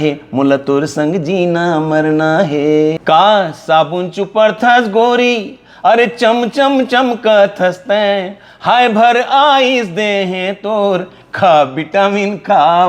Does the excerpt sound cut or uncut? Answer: cut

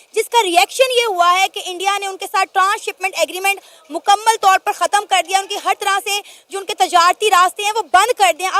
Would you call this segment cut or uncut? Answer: uncut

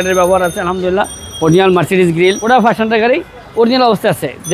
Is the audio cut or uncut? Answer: cut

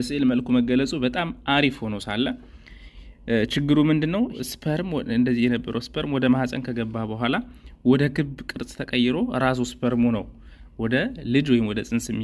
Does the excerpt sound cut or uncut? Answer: cut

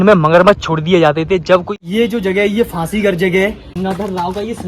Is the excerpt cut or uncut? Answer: cut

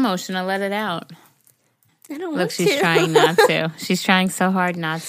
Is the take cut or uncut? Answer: cut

